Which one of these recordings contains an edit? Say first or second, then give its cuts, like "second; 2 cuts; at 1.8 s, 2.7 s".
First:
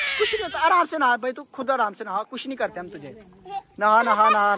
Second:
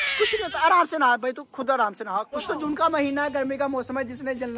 second; 1 cut; at 2.4 s